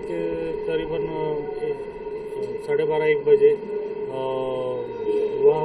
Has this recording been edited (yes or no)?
no